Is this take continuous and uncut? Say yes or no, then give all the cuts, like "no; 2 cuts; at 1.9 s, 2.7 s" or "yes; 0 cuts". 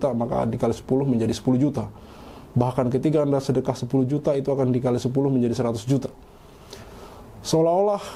yes; 0 cuts